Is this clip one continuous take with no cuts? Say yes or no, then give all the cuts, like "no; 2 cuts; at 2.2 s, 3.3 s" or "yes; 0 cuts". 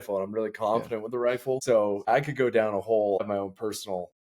no; 2 cuts; at 2.1 s, 3.2 s